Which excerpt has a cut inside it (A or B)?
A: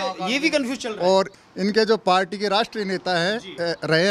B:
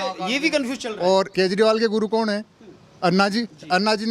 B